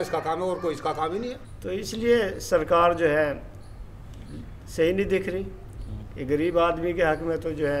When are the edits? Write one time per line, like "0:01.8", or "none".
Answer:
0:01.5